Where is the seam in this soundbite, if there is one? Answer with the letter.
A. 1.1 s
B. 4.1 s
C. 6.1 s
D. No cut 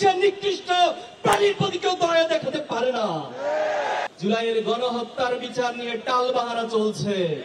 B